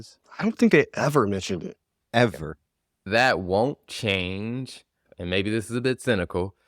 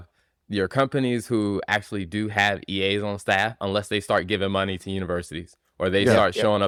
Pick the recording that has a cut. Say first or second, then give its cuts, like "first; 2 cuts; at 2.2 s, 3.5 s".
first; 2 cuts; at 3.0 s, 5.0 s